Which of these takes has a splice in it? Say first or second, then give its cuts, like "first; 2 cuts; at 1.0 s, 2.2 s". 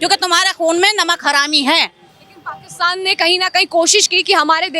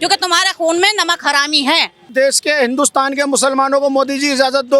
second; 1 cut; at 2.1 s